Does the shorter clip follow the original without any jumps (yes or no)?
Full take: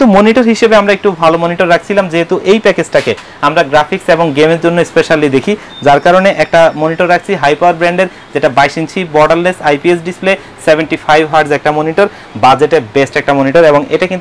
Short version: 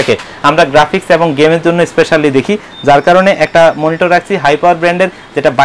yes